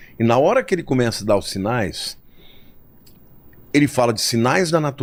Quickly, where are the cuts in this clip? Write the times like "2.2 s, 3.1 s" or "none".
none